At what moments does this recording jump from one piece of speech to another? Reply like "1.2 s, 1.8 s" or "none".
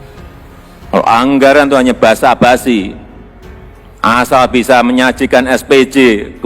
0.9 s